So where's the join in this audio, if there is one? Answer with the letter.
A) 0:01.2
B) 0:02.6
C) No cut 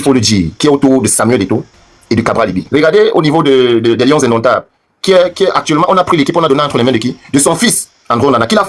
B